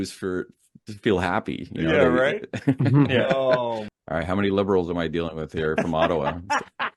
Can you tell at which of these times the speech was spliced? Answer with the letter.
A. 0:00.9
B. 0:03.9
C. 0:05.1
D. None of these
B